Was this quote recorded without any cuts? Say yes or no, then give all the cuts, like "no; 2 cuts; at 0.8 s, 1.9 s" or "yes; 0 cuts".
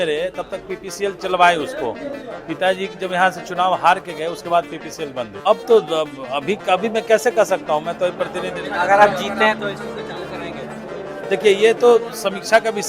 no; 1 cut; at 5.4 s